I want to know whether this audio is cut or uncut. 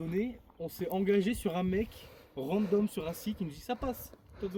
uncut